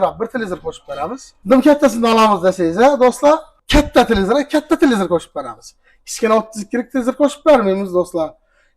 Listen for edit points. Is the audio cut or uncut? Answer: cut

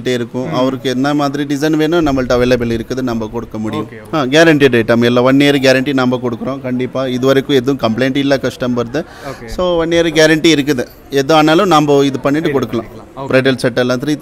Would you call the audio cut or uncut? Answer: cut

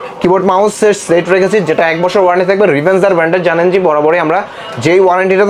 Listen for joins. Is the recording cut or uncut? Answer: uncut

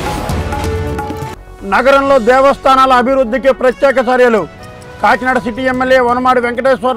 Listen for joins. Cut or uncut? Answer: cut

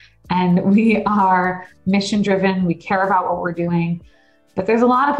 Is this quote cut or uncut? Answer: uncut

